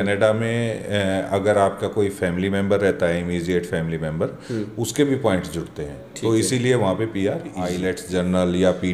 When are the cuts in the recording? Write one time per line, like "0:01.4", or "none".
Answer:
0:07.7